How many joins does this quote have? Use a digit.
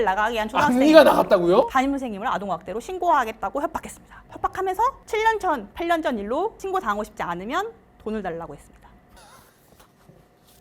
1